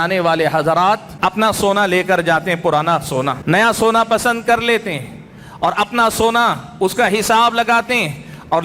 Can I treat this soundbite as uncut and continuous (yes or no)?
no